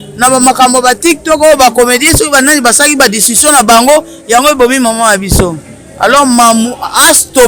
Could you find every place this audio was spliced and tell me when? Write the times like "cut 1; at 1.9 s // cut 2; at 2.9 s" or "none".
none